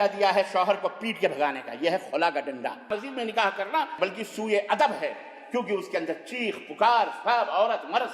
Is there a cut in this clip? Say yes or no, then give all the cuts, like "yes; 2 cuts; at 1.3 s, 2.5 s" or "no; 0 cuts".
yes; 2 cuts; at 2.9 s, 3.9 s